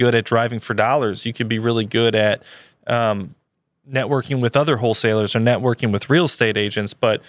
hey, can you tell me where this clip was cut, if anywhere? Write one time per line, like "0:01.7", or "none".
none